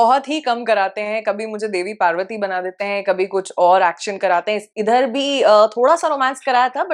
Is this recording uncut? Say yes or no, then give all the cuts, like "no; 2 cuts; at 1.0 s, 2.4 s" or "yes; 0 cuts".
yes; 0 cuts